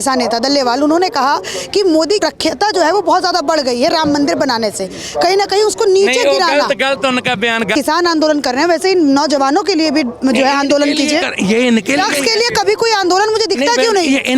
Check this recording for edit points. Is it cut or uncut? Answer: cut